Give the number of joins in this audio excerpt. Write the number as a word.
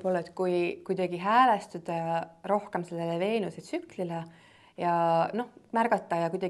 zero